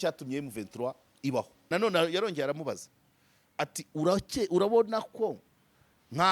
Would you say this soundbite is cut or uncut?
cut